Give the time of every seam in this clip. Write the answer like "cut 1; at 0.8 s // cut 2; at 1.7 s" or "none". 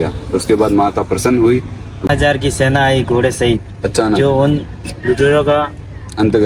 cut 1; at 2.1 s